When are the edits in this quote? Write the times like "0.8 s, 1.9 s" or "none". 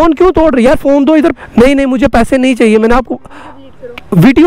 1.4 s